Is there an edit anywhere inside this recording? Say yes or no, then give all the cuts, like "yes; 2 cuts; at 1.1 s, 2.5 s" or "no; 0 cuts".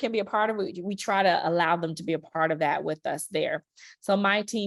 no; 0 cuts